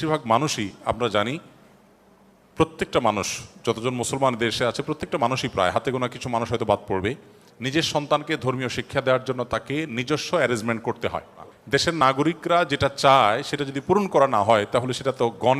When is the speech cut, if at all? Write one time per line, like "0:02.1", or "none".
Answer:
0:11.5